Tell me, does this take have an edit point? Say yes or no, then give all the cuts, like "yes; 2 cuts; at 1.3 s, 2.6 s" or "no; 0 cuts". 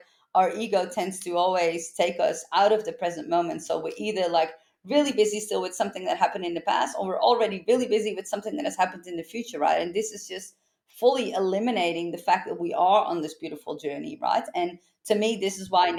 no; 0 cuts